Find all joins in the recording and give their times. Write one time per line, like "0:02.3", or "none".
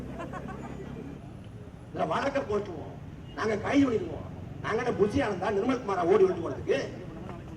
0:01.2